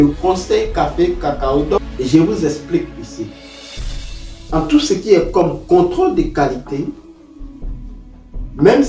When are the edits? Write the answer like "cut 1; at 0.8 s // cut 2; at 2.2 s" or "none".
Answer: cut 1; at 1.9 s